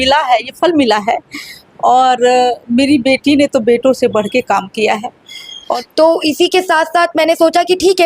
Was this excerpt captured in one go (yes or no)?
no